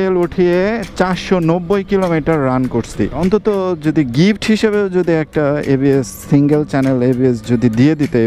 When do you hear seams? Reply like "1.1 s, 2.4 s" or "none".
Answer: 3.2 s